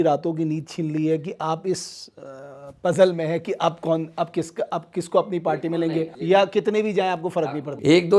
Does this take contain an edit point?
yes; 2 cuts; at 6.1 s, 7.4 s

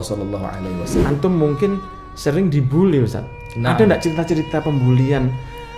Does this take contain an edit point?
yes; 1 cut; at 1.0 s

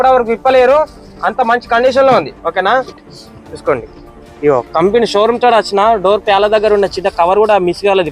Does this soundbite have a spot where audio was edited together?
yes; 1 cut; at 3.0 s

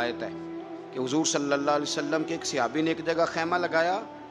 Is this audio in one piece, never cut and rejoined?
yes; 0 cuts

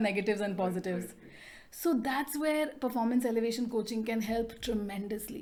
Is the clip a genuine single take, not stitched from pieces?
yes; 0 cuts

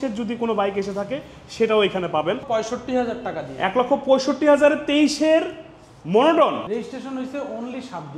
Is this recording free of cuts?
no; 2 cuts; at 2.4 s, 6.7 s

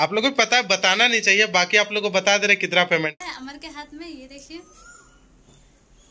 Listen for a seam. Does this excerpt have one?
yes; 1 cut; at 3.1 s

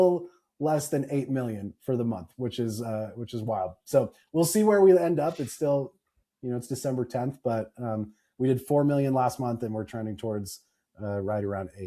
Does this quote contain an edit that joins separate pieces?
no; 0 cuts

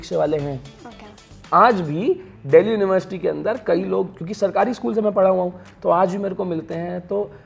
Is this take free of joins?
yes; 0 cuts

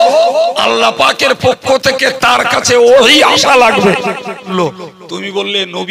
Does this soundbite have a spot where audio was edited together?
yes; 1 cut; at 4.5 s

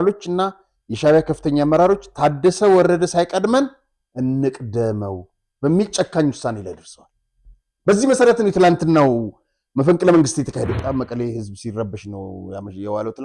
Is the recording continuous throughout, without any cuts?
no; 1 cut; at 10.7 s

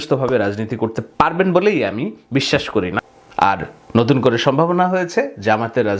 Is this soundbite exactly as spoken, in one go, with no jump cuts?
no; 1 cut; at 3.0 s

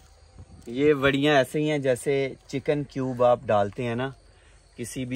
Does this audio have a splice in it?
no; 0 cuts

